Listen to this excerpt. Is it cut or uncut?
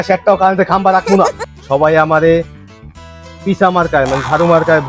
cut